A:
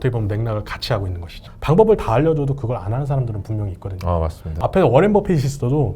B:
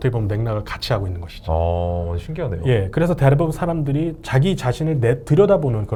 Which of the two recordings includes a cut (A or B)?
A